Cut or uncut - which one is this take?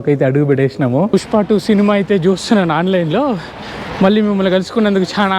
cut